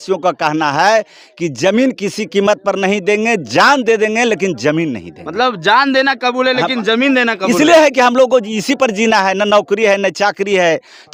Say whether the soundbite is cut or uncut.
uncut